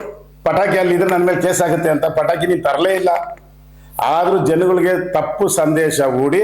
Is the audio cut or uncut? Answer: uncut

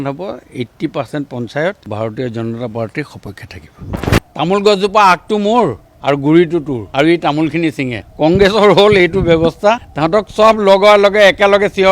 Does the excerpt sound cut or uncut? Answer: cut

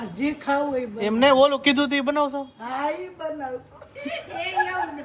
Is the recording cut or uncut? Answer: uncut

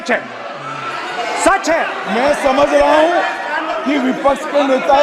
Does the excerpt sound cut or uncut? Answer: cut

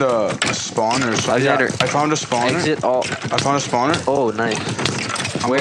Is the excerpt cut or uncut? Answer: uncut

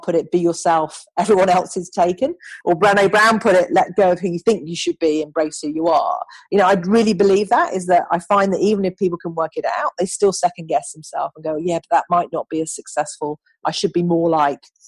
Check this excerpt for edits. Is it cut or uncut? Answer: cut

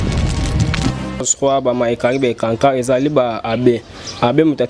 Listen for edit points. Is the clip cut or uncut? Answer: uncut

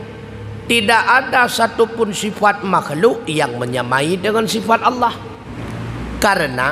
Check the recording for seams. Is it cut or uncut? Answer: cut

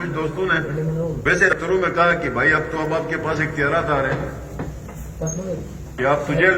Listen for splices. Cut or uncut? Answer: cut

